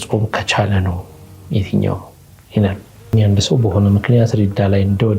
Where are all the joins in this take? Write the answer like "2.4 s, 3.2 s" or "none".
3.1 s